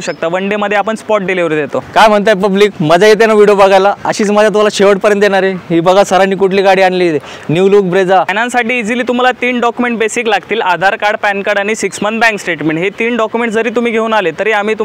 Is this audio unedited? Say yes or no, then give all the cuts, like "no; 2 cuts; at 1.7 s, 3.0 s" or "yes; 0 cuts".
no; 2 cuts; at 1.8 s, 8.3 s